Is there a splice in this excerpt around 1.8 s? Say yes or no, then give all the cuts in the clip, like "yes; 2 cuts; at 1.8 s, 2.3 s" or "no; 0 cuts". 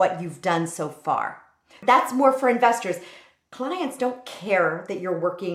yes; 1 cut; at 1.8 s